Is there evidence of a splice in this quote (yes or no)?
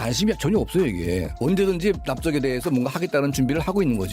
yes